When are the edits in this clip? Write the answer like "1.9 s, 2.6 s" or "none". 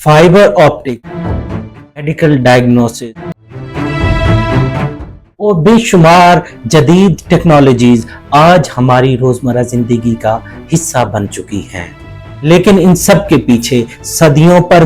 1.1 s, 3.0 s